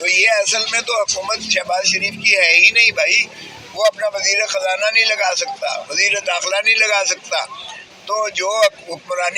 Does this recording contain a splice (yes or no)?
no